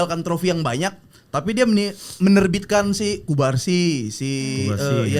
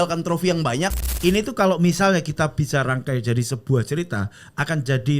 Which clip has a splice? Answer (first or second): second